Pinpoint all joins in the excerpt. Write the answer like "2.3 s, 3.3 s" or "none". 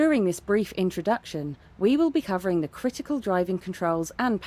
none